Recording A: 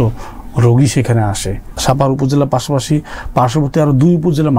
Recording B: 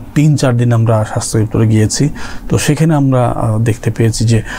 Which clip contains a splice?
A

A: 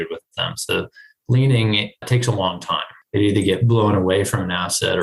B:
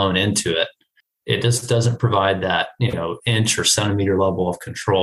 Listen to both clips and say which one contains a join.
A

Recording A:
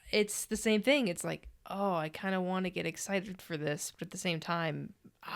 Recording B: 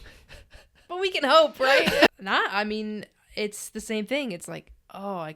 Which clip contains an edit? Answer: B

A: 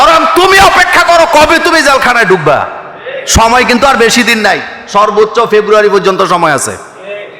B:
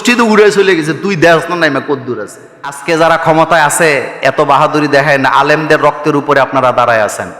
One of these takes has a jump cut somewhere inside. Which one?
B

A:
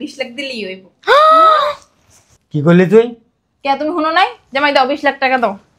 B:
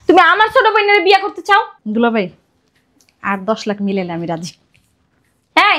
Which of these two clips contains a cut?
B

